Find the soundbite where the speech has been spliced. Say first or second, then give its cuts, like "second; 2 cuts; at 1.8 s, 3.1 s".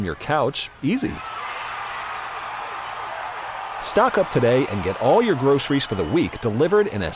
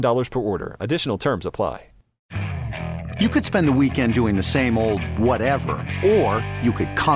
second; 1 cut; at 2.1 s